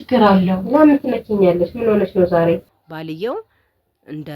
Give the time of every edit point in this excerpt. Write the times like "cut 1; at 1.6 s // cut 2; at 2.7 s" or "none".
cut 1; at 2.7 s